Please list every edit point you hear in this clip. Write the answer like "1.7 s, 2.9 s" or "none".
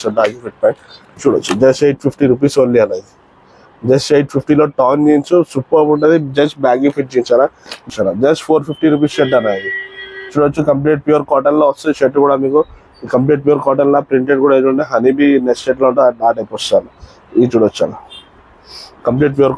7.9 s